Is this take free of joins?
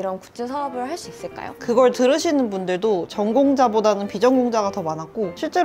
no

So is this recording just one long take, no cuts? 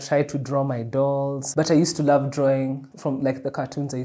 no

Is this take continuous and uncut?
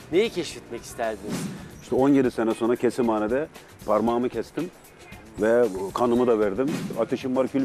no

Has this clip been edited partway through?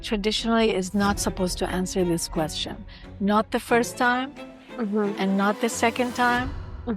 no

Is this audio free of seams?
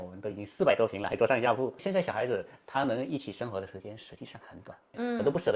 no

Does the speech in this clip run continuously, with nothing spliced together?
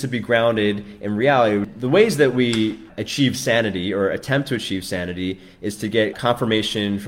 no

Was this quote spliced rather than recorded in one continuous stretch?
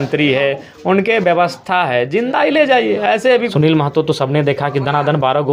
yes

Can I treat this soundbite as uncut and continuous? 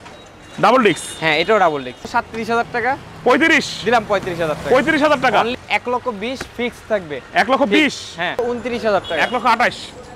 no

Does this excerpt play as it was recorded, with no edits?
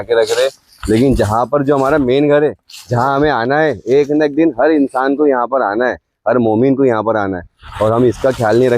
yes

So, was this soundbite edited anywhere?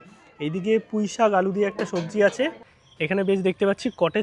yes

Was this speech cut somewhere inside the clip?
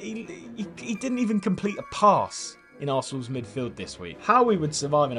no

